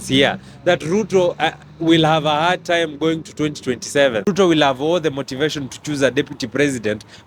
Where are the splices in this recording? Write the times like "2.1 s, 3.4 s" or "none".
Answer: 4.2 s

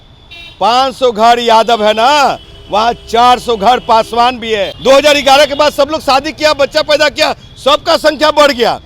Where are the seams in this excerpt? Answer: 4.7 s

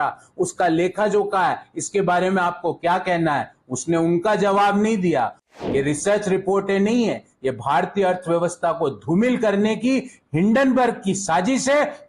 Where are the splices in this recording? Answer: 5.4 s

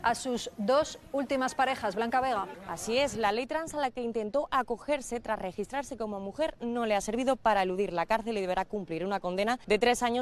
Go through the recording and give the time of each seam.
none

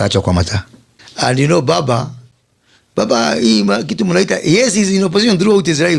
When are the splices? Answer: none

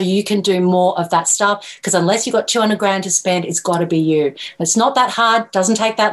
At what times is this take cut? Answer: none

